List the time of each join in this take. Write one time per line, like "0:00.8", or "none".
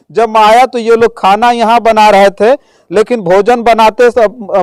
none